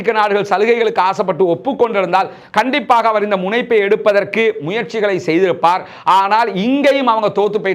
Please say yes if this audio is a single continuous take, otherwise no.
yes